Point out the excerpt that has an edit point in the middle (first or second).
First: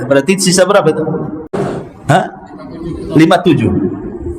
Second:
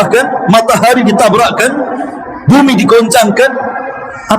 first